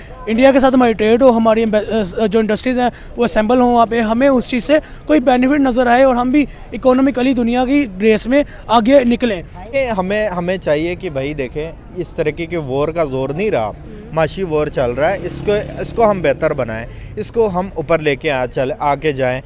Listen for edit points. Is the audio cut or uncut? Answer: cut